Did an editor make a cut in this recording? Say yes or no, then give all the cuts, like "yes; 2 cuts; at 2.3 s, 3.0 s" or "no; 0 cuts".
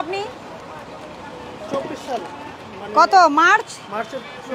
no; 0 cuts